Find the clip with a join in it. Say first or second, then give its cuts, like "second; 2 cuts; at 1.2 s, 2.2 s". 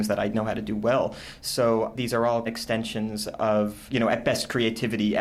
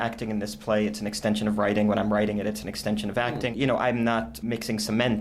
second; 1 cut; at 3.5 s